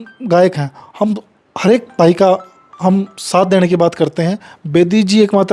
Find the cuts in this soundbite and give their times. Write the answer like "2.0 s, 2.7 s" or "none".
none